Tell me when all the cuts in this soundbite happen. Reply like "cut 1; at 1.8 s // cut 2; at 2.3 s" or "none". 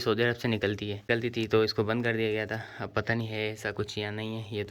cut 1; at 1.1 s